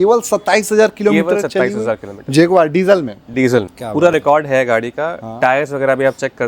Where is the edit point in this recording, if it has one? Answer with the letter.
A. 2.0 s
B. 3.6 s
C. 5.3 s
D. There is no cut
D